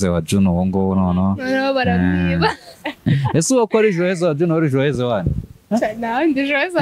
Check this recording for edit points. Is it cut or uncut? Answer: cut